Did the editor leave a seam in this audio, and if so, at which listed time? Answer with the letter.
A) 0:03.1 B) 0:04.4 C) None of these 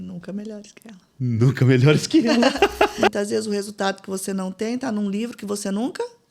A